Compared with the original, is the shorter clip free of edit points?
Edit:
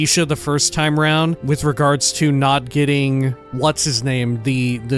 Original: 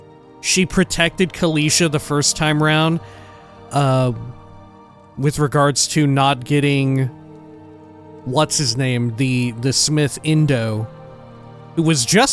no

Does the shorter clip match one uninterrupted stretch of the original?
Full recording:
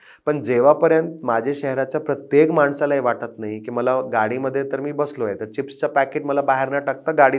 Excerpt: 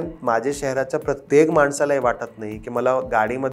yes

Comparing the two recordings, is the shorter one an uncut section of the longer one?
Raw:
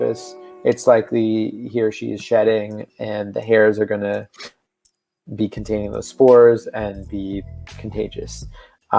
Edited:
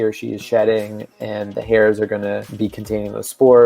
no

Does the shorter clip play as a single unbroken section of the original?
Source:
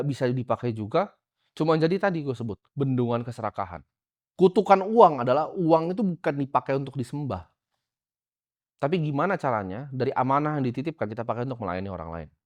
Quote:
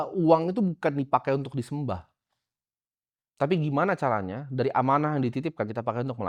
yes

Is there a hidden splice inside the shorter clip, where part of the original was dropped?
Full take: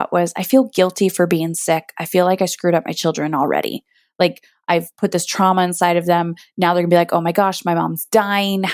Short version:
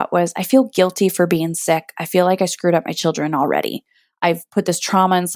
yes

